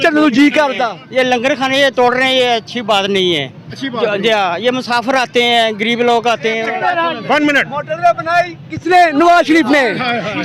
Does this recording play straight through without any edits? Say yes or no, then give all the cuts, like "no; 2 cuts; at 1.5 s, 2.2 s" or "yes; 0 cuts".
no; 2 cuts; at 0.9 s, 6.6 s